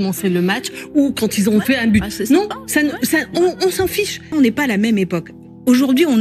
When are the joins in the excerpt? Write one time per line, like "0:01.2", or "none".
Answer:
0:04.2